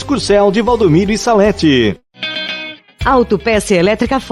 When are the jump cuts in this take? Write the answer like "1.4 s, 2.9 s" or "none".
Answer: 2.1 s